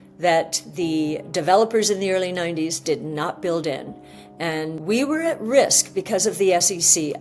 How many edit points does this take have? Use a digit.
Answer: 1